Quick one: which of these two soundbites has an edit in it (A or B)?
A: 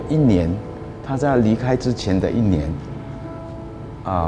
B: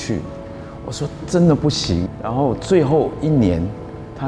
B